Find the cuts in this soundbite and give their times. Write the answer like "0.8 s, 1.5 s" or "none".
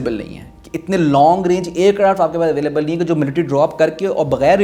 none